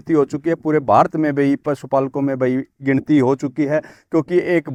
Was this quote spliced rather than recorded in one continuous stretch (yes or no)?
no